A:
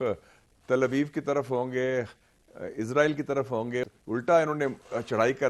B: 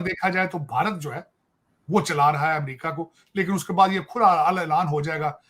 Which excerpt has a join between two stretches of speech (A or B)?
A